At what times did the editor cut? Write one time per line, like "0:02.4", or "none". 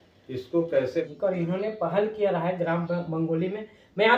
0:01.1